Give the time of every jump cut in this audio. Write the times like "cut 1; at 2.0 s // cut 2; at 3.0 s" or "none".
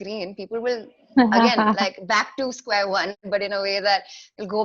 cut 1; at 3.2 s